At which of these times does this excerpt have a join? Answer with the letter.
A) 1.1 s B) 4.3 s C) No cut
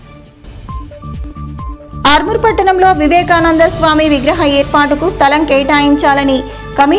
A